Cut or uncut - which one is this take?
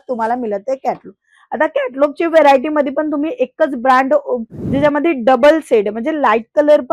cut